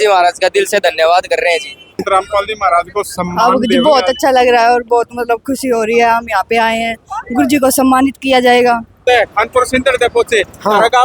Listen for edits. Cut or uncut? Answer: cut